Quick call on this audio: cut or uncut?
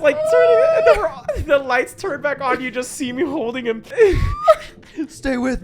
cut